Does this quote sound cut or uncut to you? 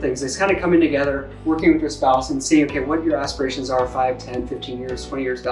uncut